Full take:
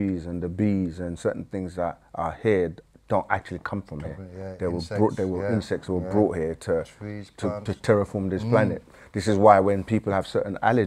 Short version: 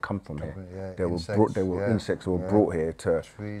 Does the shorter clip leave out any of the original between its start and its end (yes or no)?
no